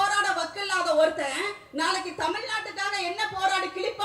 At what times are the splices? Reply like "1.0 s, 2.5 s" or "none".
none